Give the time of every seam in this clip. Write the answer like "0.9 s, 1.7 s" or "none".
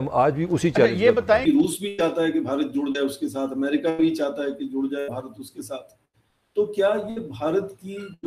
1.4 s